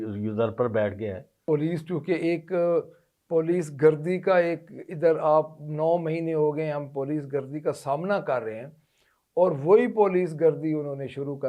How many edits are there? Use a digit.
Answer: 1